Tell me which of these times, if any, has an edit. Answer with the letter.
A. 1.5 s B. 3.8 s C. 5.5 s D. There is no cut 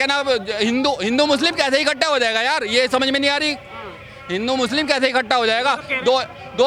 D